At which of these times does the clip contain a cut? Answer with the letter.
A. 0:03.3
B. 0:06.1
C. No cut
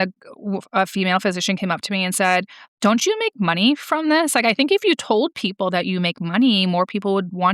C